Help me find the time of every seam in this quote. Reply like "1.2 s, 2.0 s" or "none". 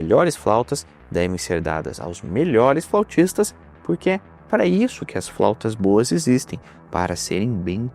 none